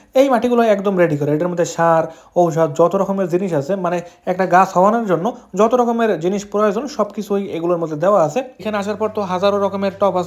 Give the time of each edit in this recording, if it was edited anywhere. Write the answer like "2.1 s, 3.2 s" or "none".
8.6 s